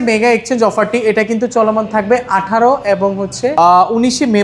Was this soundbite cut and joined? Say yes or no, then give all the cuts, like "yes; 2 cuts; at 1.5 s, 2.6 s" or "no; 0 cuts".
no; 0 cuts